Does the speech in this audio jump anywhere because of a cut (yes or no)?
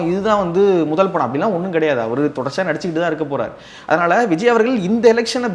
no